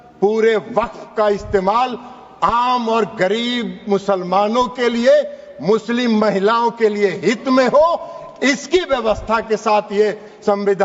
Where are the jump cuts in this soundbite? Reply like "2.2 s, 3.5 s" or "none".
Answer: none